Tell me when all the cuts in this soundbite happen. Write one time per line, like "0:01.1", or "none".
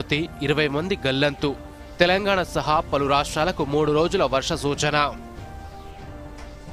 none